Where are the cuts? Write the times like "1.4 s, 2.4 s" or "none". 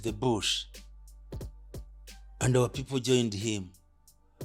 none

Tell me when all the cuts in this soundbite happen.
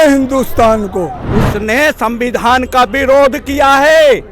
1.2 s

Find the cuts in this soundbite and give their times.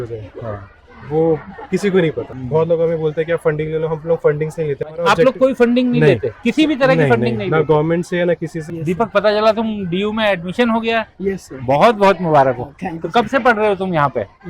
2.3 s, 5.0 s, 8.6 s

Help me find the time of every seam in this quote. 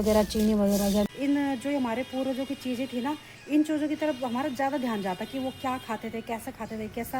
1.0 s

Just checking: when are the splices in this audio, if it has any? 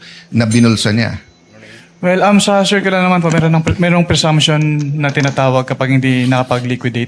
none

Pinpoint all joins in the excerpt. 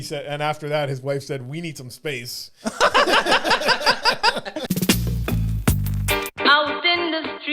4.6 s

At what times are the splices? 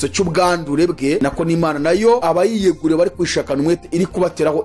1.2 s, 2.2 s

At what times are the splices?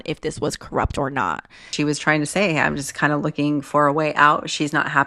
1.7 s

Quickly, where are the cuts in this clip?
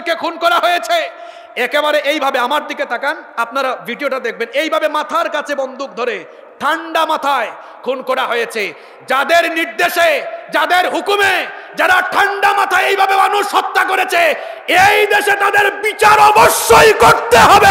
none

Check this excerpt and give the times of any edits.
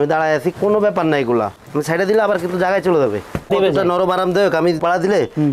1.6 s, 3.5 s

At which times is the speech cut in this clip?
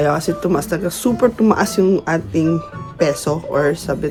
none

